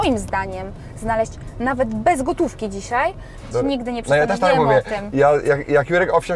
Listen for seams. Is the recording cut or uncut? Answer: cut